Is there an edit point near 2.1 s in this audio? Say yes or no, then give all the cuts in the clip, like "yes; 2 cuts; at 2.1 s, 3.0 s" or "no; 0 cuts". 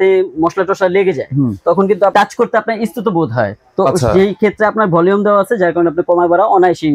yes; 1 cut; at 2.1 s